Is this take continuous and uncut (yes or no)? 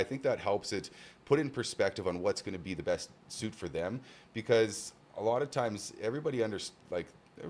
yes